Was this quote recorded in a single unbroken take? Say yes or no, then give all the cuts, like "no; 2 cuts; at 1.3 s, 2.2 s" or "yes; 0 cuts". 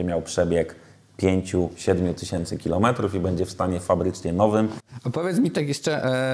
no; 1 cut; at 4.9 s